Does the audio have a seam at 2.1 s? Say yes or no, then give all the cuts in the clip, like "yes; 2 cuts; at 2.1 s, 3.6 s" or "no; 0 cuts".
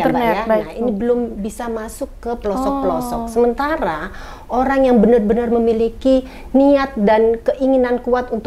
no; 0 cuts